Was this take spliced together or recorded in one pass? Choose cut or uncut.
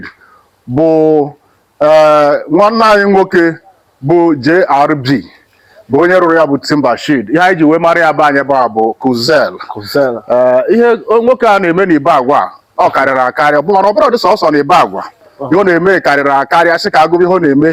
uncut